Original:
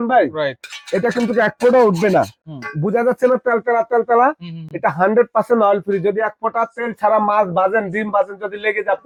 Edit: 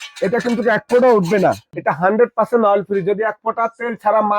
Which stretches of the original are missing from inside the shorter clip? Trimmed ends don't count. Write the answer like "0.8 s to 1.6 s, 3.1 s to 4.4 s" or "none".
2.4 s to 4.7 s

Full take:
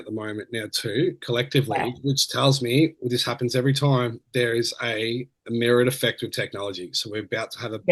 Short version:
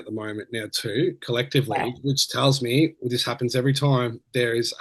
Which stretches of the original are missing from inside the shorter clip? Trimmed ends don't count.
none

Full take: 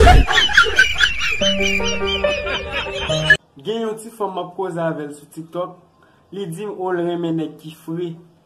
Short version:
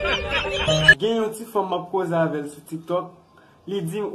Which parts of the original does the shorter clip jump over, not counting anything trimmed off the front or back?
3.4 s to 3.6 s

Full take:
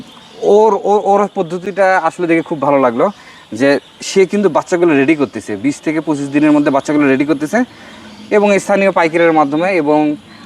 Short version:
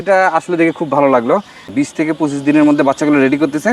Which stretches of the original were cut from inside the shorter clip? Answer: 3.3 s to 5.5 s

